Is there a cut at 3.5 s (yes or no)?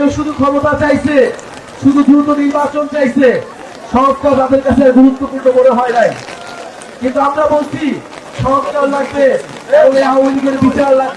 no